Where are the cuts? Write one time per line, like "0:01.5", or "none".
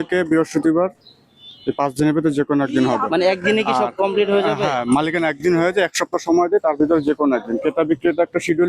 none